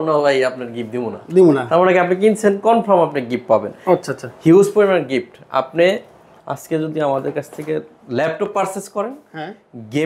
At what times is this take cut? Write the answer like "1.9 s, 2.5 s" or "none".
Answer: none